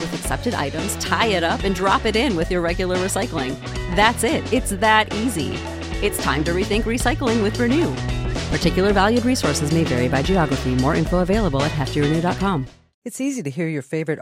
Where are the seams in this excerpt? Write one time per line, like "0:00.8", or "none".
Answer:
0:13.0